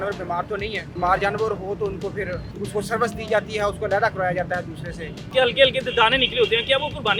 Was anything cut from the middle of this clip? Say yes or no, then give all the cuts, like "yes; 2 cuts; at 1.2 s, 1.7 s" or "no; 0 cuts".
yes; 3 cuts; at 0.9 s, 2.5 s, 5.3 s